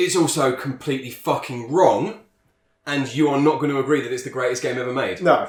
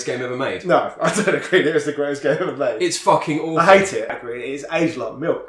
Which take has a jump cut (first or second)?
second